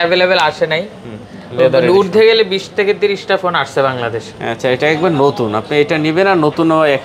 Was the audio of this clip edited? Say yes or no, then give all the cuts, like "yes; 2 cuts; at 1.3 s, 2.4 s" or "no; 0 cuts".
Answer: no; 0 cuts